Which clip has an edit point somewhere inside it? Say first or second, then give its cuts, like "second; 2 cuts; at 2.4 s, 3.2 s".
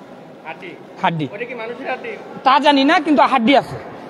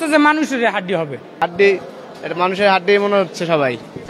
second; 1 cut; at 1.3 s